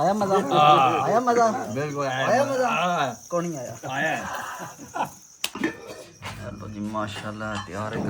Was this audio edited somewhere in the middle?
yes; 1 cut; at 5.4 s

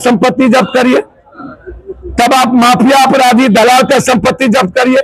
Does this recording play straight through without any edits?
yes; 0 cuts

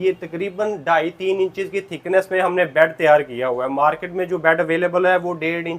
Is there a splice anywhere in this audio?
no; 0 cuts

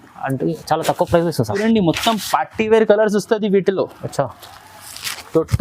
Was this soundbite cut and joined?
yes; 1 cut; at 1.6 s

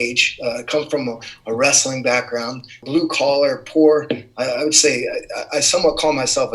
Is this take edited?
yes; 1 cut; at 2.8 s

